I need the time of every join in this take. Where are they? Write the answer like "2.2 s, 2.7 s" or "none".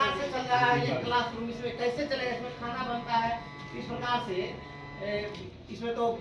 none